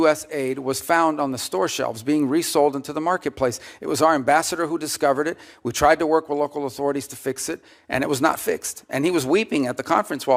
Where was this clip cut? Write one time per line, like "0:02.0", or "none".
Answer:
none